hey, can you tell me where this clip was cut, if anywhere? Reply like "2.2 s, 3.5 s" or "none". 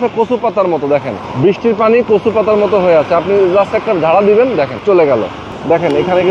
1.2 s, 5.1 s